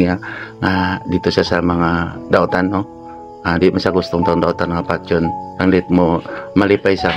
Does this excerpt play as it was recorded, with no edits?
yes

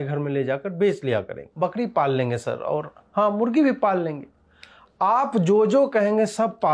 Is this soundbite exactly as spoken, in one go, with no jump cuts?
no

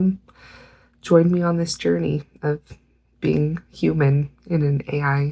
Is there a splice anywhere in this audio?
no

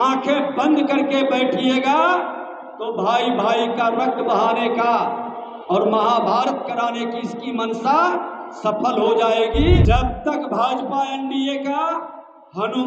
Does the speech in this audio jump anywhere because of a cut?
yes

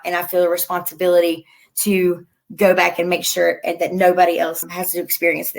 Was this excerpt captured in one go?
no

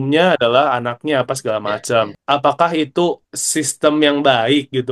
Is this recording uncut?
no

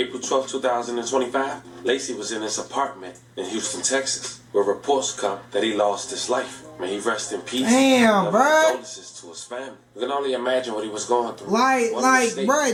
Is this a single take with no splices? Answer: yes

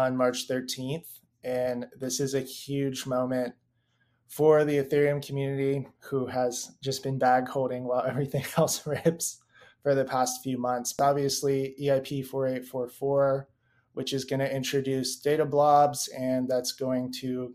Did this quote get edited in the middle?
yes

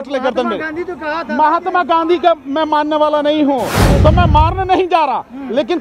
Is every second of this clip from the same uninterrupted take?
no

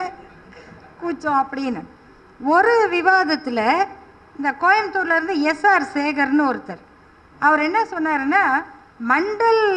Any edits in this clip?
no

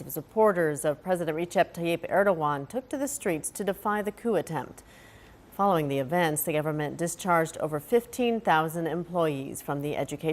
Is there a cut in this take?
yes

